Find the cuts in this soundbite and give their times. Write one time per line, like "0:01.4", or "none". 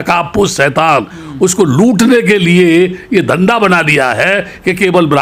none